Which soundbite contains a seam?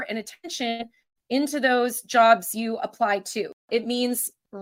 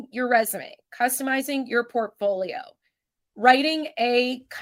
first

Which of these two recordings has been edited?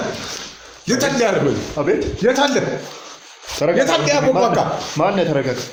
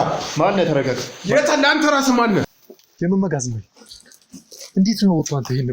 second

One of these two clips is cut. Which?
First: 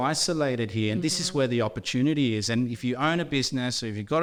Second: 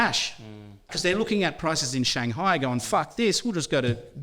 second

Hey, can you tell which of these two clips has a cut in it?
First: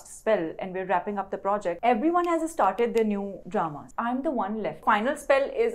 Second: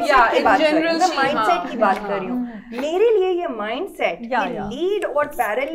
first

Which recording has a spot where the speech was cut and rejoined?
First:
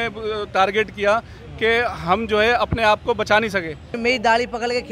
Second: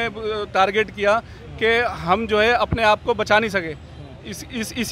first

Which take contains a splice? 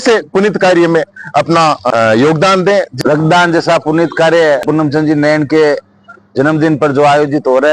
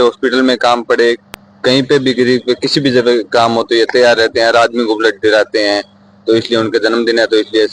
first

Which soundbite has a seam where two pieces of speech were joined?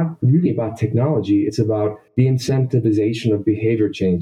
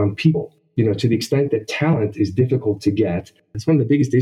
second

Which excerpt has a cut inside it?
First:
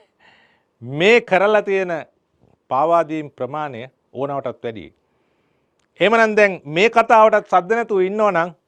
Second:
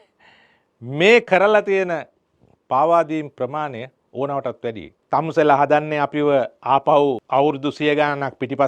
second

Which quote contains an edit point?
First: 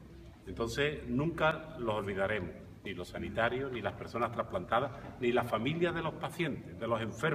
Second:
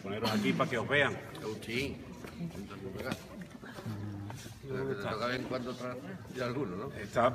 first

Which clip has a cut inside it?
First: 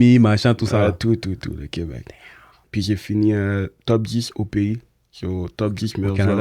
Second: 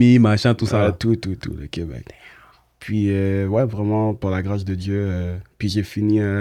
first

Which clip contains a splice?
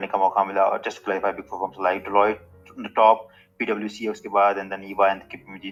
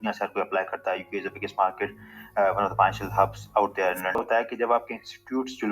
second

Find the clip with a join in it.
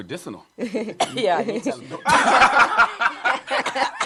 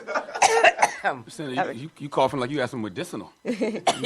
second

